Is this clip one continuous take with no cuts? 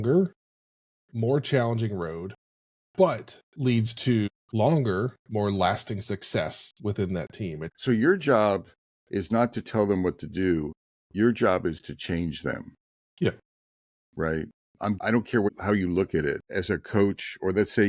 no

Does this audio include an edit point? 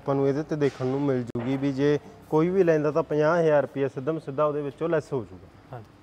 no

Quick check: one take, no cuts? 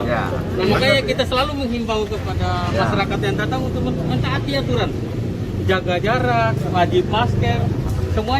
yes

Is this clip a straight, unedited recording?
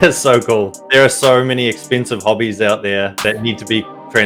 yes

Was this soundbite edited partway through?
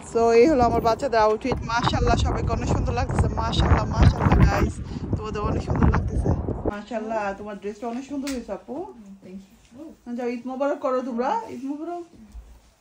yes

